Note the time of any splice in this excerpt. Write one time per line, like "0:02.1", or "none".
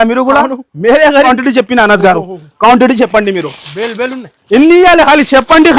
0:01.3